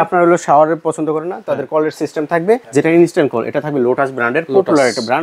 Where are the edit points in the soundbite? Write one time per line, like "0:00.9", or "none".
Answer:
0:02.7